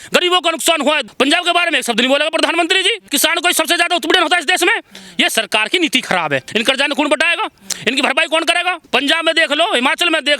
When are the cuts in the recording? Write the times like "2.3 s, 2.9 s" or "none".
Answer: 1.1 s, 3.1 s, 6.5 s, 8.8 s